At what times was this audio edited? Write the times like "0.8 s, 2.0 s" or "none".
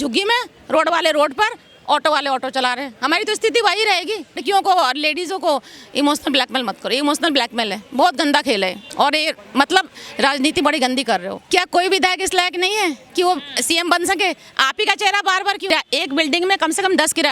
4.4 s, 8.8 s, 11.3 s, 15.7 s